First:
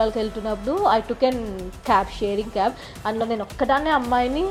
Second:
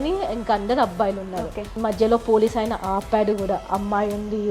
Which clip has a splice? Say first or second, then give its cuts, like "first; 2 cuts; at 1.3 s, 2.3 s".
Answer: second; 1 cut; at 1.7 s